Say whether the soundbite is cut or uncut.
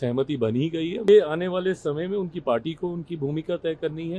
cut